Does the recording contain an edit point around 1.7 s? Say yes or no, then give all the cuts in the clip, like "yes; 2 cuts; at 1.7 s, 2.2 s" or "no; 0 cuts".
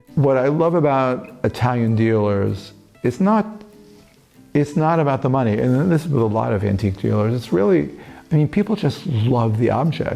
no; 0 cuts